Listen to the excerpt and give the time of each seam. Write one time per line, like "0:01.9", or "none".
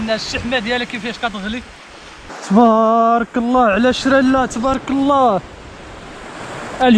0:02.3